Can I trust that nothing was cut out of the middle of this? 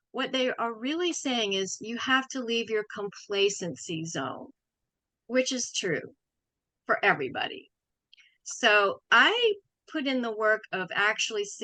yes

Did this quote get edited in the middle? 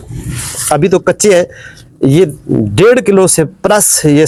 no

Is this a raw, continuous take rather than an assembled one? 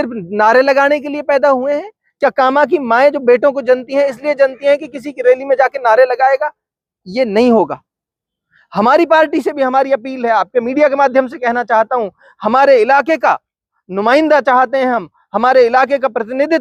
yes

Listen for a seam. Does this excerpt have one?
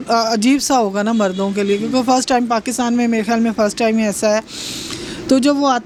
no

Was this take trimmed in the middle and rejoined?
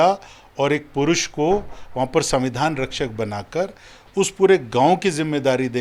no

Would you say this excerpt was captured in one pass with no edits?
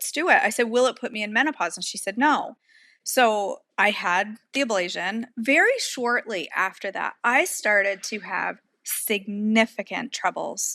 no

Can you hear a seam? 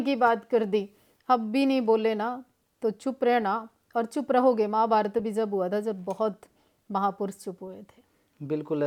no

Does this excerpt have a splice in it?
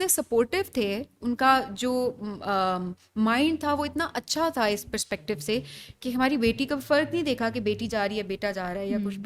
no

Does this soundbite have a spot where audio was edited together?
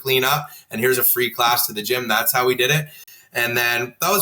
no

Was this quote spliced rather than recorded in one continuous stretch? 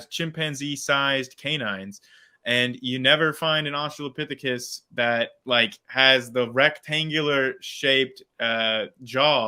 no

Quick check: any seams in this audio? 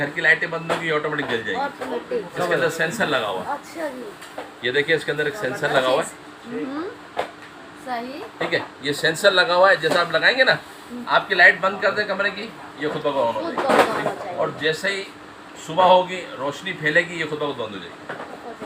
no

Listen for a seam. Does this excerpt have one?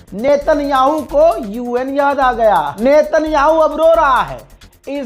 yes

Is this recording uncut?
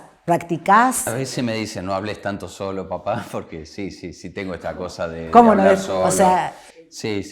no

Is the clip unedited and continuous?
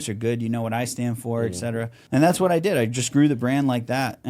no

